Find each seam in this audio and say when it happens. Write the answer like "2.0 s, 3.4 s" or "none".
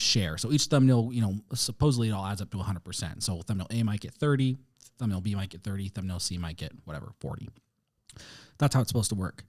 none